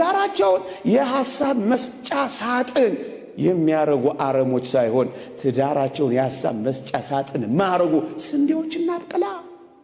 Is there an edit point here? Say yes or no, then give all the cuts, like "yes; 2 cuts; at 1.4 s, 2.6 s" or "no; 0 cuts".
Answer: no; 0 cuts